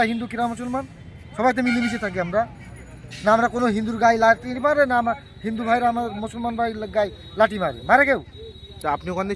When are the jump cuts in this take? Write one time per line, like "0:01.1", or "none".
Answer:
none